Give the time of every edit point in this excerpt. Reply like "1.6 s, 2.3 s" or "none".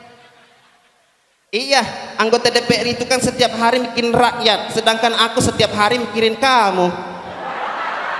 7.3 s

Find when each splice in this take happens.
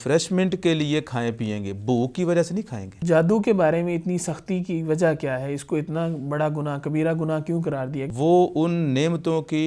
3.0 s, 8.0 s

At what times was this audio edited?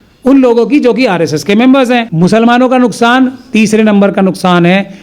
2.1 s

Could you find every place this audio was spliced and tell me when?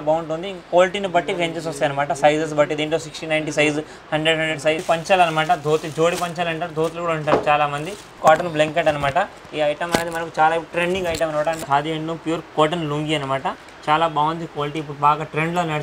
4.8 s, 8.1 s, 11.6 s

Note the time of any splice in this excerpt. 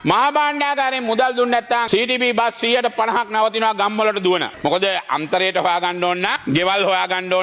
4.5 s

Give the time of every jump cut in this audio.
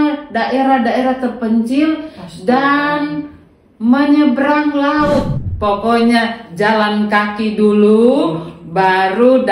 5.4 s

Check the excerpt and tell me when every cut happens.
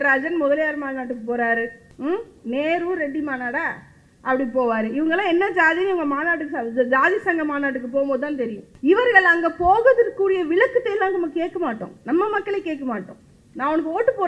1.8 s, 8.6 s

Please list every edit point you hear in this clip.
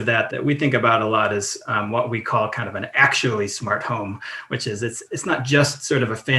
none

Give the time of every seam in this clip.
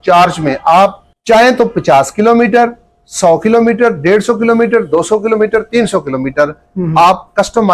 1.1 s

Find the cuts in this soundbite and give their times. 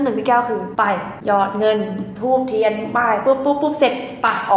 1.1 s

